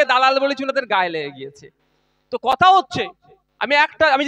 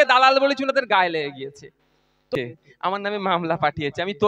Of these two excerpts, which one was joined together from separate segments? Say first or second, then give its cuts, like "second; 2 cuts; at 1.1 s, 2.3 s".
second; 1 cut; at 2.3 s